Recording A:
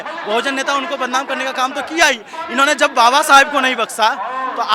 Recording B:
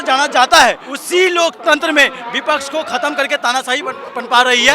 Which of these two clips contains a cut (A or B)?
B